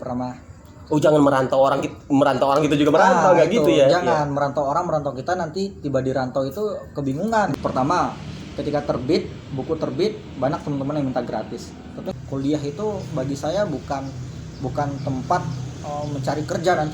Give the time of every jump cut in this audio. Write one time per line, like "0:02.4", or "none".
0:07.5
0:12.1